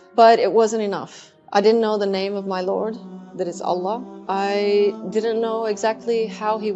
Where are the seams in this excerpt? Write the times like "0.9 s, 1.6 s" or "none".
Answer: none